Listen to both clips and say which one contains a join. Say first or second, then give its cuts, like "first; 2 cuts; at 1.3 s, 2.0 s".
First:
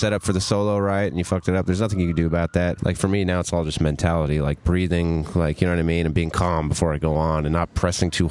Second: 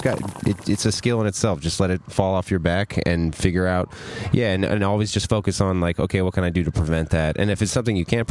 first; 1 cut; at 2.8 s